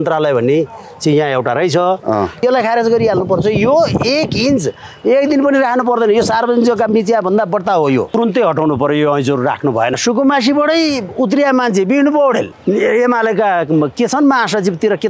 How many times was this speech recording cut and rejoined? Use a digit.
4